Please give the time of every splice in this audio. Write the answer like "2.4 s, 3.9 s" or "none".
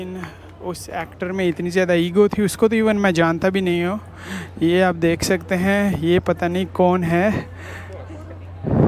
none